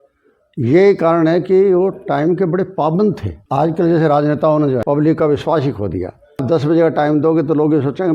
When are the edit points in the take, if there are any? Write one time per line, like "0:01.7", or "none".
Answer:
0:03.3
0:04.8
0:06.4